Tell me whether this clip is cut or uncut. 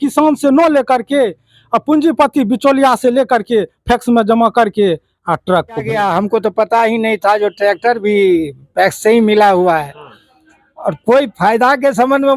cut